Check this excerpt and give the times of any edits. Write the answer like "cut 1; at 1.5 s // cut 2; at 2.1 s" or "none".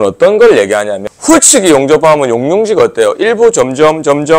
cut 1; at 1.1 s